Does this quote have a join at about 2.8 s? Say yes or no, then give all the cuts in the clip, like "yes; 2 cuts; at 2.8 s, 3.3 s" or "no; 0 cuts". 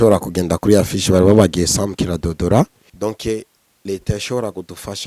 yes; 1 cut; at 2.8 s